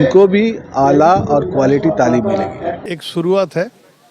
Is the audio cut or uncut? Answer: cut